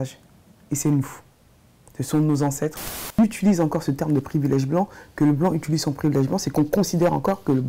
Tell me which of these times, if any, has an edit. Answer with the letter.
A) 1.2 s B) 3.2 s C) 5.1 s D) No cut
B